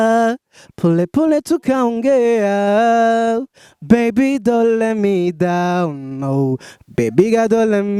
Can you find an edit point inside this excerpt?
no; 0 cuts

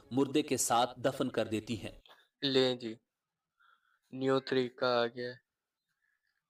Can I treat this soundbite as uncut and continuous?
yes; 0 cuts

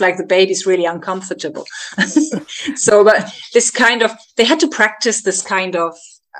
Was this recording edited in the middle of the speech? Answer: no; 0 cuts

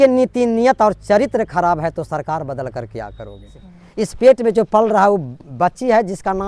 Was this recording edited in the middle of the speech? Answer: yes; 1 cut; at 3.6 s

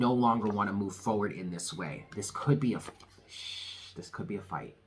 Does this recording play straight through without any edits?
yes; 0 cuts

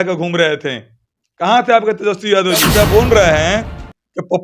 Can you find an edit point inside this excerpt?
yes; 1 cut; at 2.7 s

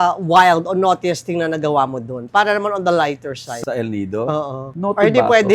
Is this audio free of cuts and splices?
yes; 0 cuts

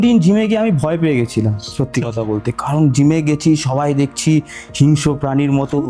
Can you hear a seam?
no; 0 cuts

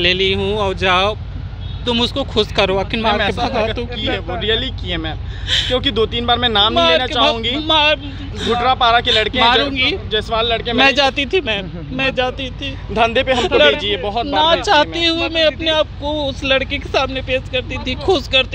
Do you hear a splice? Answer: no; 0 cuts

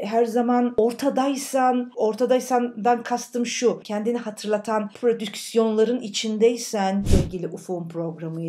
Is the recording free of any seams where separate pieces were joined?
no; 1 cut; at 7.1 s

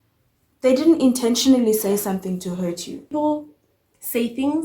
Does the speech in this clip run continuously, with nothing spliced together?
no; 1 cut; at 3.1 s

